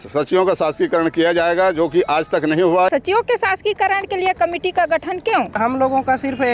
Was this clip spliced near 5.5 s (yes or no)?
yes